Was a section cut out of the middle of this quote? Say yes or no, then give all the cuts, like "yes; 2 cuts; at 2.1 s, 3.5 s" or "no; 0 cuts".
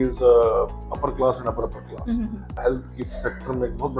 yes; 1 cut; at 2.5 s